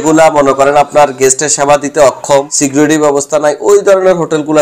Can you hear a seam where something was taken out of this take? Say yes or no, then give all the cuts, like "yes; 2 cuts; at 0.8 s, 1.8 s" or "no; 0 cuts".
yes; 1 cut; at 2.6 s